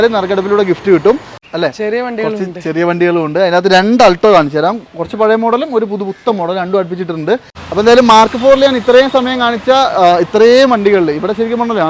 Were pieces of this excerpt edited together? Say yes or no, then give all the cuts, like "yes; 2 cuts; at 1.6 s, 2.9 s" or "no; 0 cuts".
yes; 2 cuts; at 1.4 s, 7.6 s